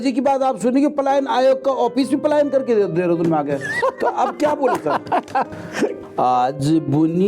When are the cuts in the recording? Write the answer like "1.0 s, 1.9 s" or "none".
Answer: 6.0 s